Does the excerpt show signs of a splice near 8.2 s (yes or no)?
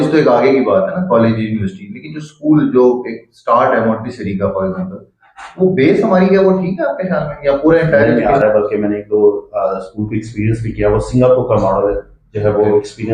yes